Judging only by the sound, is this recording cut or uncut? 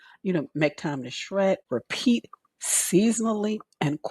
cut